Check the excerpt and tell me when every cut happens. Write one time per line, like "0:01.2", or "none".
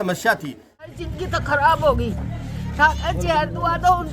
0:00.9